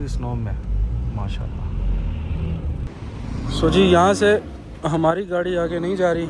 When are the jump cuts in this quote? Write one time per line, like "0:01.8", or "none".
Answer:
0:02.9